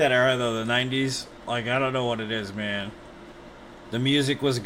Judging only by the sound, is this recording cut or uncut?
uncut